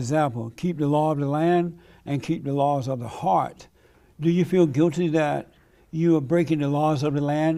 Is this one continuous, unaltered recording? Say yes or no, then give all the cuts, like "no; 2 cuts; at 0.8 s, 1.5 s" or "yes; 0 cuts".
yes; 0 cuts